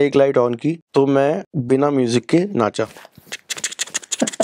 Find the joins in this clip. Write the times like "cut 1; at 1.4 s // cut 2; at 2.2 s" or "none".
cut 1; at 0.8 s // cut 2; at 1.5 s